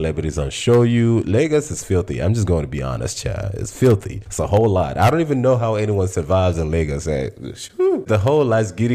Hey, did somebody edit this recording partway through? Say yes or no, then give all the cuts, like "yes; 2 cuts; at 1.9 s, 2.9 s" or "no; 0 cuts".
no; 0 cuts